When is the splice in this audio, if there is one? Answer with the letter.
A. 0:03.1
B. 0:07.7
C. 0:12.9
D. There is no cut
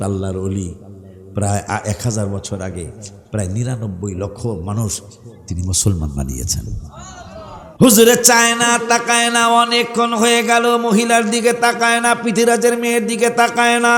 B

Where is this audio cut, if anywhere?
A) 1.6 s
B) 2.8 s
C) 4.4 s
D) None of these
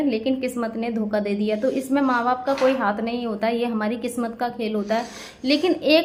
D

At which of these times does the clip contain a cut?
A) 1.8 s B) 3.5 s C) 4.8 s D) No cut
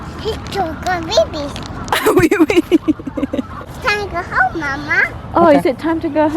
B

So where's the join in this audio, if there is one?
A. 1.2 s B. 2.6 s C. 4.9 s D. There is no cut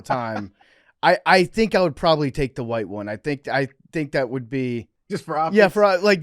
C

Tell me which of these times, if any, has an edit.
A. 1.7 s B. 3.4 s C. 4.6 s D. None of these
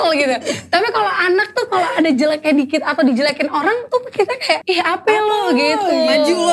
C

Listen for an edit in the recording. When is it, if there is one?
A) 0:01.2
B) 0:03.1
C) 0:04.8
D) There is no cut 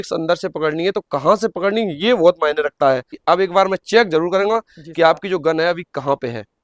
B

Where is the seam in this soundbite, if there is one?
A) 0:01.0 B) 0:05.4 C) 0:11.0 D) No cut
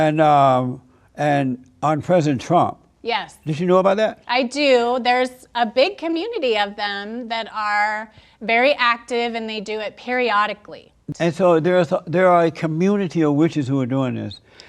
C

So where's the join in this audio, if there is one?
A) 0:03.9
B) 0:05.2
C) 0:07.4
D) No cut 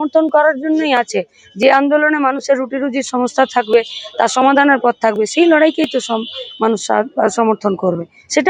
D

